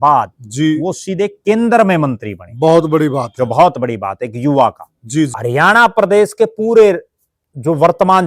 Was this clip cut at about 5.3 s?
yes; 1 cut; at 5.3 s

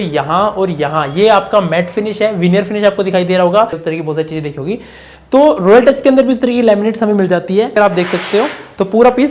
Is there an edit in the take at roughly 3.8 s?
yes; 2 cuts; at 3.8 s, 7.8 s

